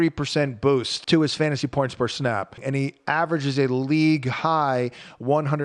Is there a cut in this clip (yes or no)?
yes